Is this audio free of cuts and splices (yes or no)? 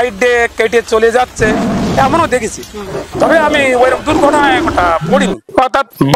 yes